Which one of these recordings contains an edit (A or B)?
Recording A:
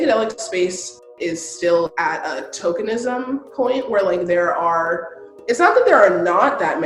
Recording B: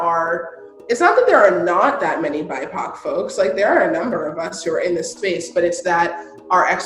A